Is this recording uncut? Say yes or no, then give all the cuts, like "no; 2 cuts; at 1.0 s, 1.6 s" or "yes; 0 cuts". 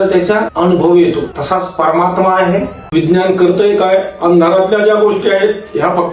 no; 1 cut; at 2.8 s